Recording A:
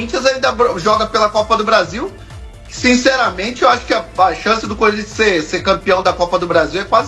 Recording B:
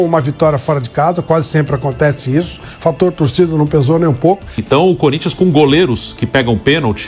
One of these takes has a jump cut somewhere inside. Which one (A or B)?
B